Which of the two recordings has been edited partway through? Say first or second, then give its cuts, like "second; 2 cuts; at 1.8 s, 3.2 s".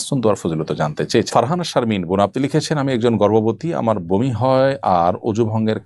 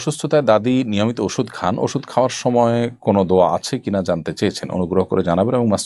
first; 1 cut; at 1.3 s